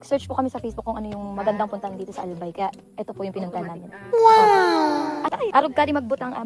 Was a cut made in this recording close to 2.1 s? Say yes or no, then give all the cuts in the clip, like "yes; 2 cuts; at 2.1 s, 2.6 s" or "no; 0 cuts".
no; 1 cut; at 5.3 s